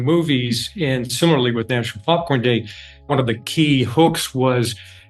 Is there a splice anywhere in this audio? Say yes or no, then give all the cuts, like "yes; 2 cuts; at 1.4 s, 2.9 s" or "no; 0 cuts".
yes; 1 cut; at 3.1 s